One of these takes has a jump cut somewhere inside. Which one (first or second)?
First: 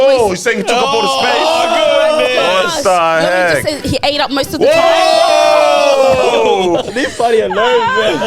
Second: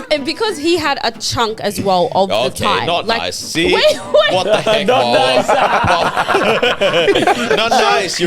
first